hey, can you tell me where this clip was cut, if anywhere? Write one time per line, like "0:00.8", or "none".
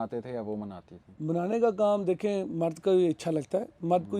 none